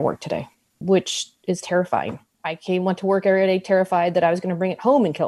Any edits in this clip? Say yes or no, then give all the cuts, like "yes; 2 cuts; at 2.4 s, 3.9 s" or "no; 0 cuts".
yes; 1 cut; at 2.3 s